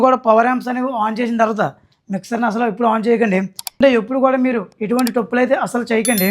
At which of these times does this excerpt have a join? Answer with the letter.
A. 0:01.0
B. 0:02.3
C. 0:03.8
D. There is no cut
C